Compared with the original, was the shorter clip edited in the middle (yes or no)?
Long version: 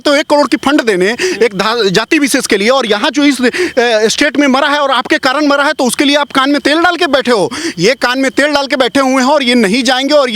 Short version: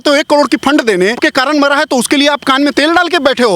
yes